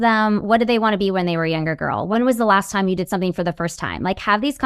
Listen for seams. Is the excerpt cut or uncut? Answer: cut